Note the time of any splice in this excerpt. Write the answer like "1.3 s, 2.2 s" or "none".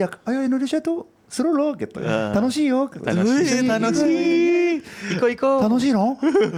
none